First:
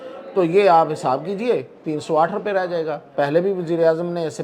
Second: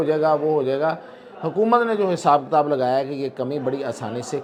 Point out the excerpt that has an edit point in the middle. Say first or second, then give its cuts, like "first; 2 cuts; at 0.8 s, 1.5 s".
first; 1 cut; at 3.1 s